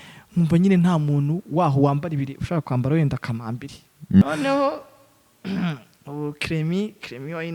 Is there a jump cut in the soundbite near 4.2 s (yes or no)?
yes